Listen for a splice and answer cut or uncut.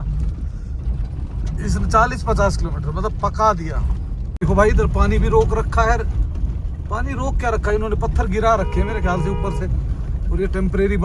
cut